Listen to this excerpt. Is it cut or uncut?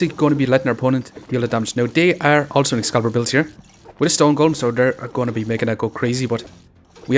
uncut